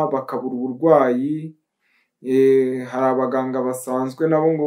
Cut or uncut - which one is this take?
uncut